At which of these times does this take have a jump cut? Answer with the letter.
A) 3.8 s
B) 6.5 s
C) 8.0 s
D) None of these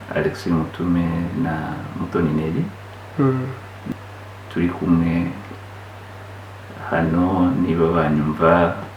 A